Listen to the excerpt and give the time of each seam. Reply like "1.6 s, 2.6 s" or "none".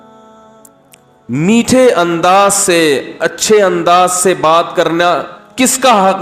1.2 s